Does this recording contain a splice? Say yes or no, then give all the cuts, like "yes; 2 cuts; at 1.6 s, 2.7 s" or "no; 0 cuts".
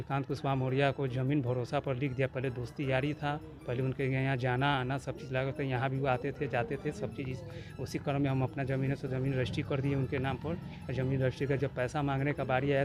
no; 0 cuts